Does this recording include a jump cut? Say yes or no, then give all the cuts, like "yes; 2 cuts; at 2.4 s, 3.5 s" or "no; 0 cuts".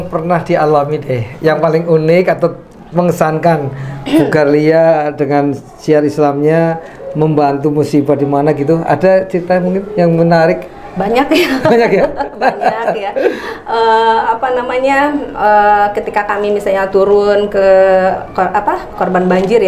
no; 0 cuts